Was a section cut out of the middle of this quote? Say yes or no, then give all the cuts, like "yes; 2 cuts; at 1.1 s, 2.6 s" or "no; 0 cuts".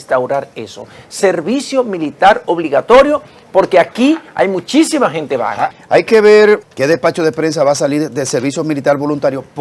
yes; 2 cuts; at 5.7 s, 6.6 s